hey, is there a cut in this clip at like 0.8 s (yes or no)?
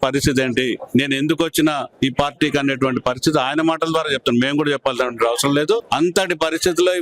yes